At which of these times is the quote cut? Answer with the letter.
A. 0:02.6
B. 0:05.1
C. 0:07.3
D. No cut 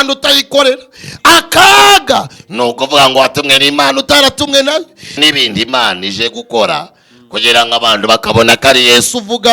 B